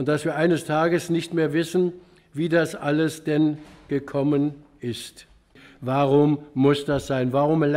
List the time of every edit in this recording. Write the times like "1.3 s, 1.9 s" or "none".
5.7 s